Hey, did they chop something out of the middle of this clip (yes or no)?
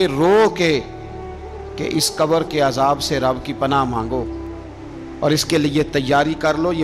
no